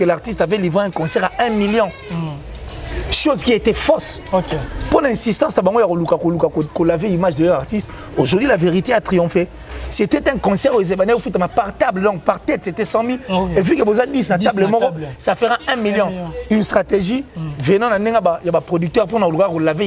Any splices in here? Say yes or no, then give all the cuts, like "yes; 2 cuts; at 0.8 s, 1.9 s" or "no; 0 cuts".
no; 0 cuts